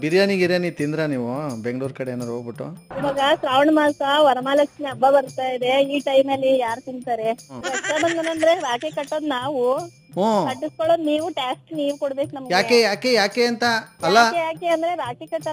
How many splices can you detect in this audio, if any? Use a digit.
2